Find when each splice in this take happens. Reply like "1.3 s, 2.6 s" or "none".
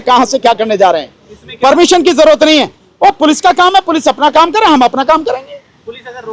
none